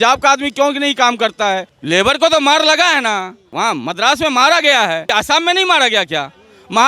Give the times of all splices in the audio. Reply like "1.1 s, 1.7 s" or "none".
1.7 s, 3.4 s, 5.1 s